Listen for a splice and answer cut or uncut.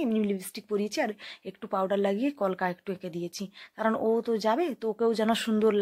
uncut